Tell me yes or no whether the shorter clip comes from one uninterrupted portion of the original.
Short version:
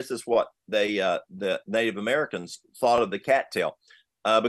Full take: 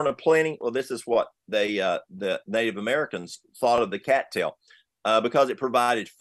yes